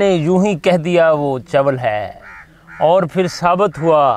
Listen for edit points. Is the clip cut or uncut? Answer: uncut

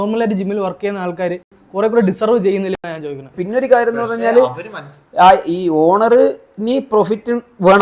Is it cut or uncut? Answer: cut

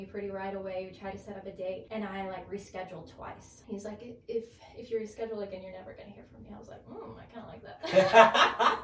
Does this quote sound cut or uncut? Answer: cut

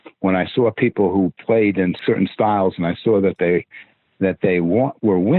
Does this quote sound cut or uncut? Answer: cut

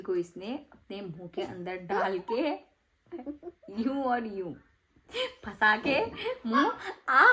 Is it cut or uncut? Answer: uncut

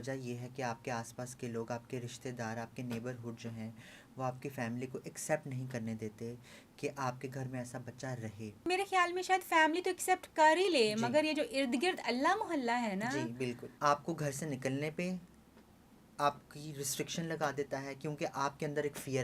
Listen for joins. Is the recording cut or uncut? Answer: cut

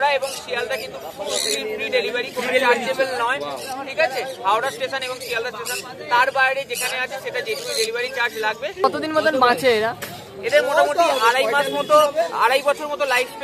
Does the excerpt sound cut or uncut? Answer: cut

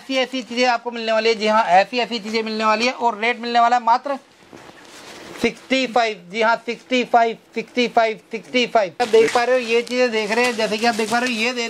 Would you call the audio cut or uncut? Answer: cut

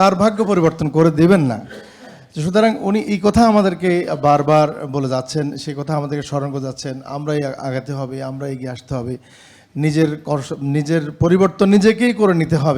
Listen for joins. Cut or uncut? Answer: uncut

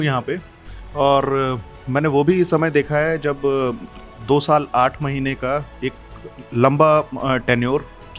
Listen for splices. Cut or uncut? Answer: uncut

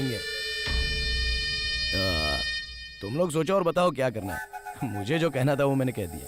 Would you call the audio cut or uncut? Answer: uncut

